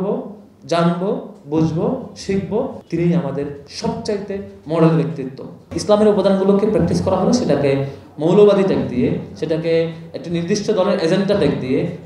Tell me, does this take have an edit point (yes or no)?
yes